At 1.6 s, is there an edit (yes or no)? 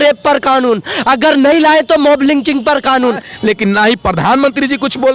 no